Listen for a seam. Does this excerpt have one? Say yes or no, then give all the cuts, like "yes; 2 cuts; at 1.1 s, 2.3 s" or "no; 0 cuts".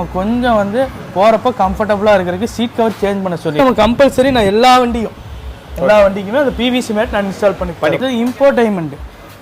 yes; 2 cuts; at 3.6 s, 8.0 s